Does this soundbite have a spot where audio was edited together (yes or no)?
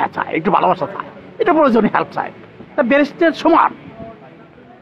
no